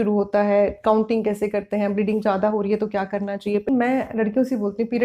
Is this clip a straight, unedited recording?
no; 1 cut; at 3.7 s

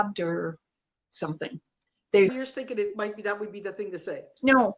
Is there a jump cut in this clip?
yes; 1 cut; at 2.3 s

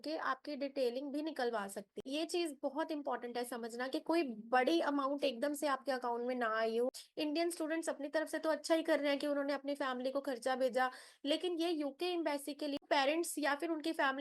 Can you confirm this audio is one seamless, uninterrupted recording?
no; 3 cuts; at 2.1 s, 6.9 s, 12.8 s

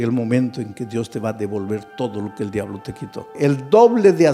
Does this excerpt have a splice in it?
yes; 1 cut; at 3.3 s

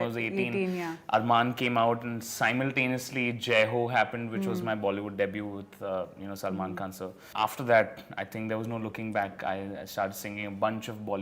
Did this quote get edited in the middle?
yes; 1 cut; at 7.2 s

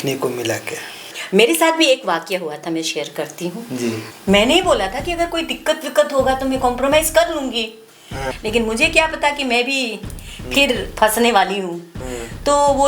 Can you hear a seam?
yes; 3 cuts; at 1.1 s, 4.1 s, 8.3 s

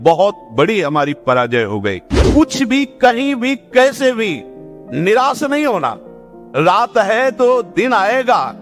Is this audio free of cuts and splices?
no; 1 cut; at 2.1 s

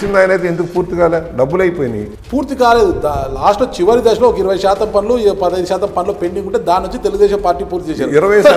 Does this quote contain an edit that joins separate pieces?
yes; 1 cut; at 2.1 s

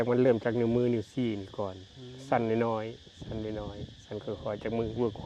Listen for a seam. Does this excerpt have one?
no; 0 cuts

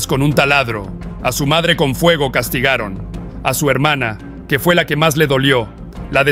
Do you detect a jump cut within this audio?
no; 0 cuts

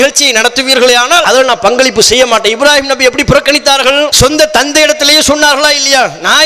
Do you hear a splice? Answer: yes; 2 cuts; at 1.2 s, 4.1 s

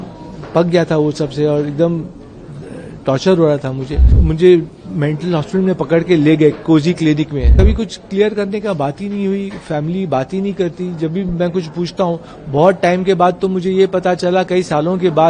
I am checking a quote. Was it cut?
yes; 2 cuts; at 4.2 s, 7.5 s

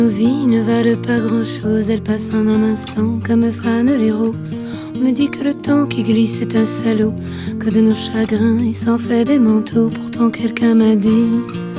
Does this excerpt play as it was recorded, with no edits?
yes; 0 cuts

